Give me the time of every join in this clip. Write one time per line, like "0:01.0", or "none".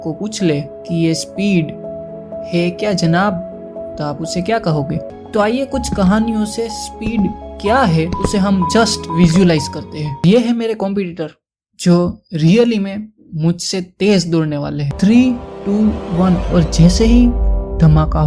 0:05.1
0:10.2
0:14.8